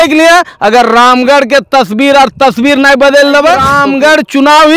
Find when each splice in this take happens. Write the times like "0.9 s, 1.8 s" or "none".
3.7 s